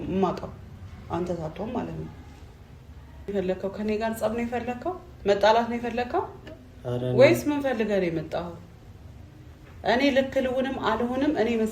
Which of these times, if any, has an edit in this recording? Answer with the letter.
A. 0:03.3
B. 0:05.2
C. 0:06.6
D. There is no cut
A